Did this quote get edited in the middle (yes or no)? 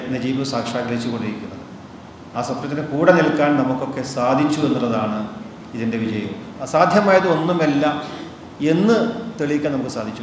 yes